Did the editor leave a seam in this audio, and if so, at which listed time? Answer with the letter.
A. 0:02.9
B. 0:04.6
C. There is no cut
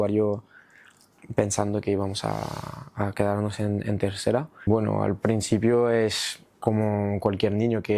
B